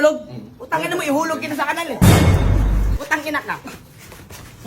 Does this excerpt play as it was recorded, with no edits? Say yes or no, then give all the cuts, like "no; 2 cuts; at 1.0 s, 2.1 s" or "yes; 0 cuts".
no; 1 cut; at 2.9 s